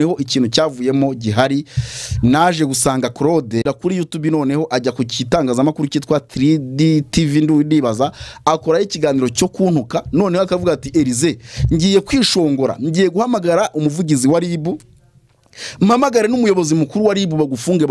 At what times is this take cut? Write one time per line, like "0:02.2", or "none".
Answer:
0:03.6